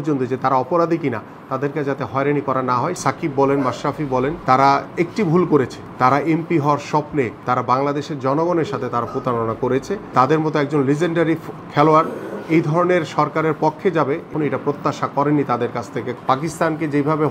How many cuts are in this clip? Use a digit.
7